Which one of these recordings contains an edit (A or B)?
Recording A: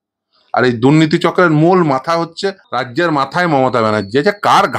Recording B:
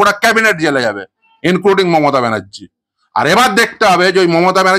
A